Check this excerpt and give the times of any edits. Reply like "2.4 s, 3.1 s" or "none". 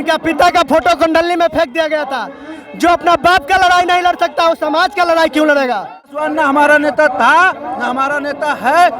6.2 s